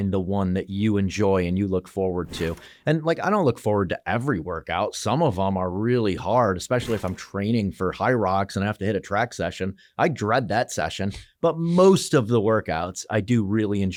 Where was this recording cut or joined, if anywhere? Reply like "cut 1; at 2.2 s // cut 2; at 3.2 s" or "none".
none